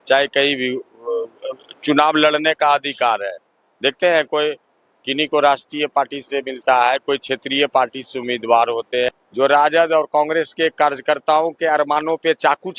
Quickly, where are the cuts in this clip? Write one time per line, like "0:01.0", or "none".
0:09.1